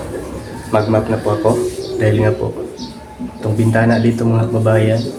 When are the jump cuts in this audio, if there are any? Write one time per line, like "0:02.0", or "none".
none